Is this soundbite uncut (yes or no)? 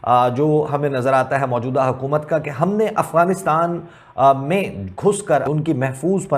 no